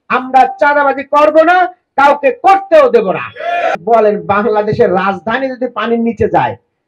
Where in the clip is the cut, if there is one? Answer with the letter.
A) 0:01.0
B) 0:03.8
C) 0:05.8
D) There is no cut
B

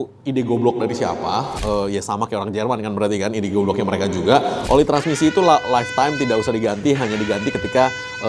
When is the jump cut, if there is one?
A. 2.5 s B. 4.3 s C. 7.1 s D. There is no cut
D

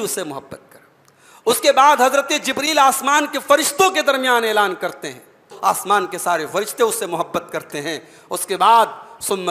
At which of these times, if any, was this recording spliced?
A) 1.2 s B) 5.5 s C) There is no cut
B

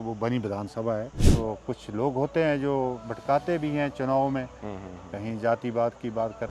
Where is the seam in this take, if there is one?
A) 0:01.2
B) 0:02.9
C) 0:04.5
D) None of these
A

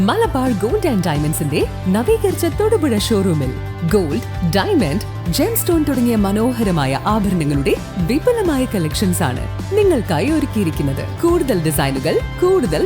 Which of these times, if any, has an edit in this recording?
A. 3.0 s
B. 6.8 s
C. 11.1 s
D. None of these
C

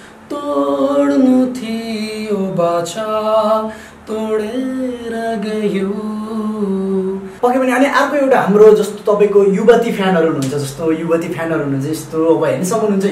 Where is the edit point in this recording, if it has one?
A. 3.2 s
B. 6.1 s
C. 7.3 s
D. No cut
C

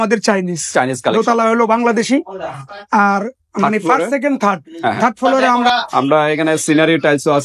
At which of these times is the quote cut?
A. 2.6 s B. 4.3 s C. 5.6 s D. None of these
C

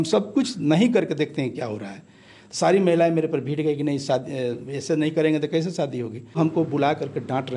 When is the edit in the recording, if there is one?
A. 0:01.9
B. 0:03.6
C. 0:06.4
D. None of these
C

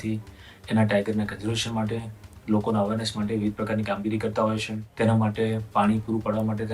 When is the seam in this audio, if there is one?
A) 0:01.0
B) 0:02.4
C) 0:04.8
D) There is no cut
C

